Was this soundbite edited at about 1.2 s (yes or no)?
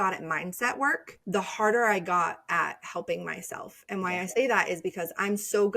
yes